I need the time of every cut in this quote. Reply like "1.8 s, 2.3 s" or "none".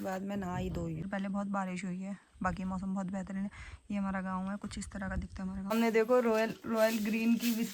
1.0 s, 5.7 s